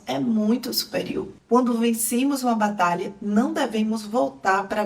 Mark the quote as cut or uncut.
cut